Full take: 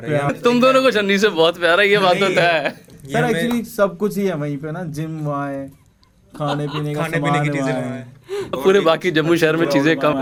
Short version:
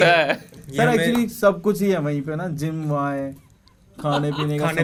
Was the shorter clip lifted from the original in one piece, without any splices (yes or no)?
yes